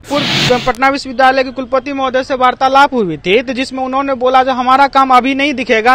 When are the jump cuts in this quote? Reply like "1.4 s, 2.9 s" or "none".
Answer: none